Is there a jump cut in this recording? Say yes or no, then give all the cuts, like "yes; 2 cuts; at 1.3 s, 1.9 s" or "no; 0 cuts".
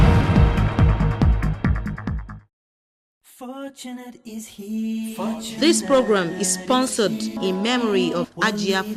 yes; 1 cut; at 2.7 s